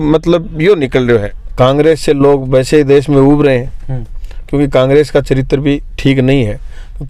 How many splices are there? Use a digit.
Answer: 1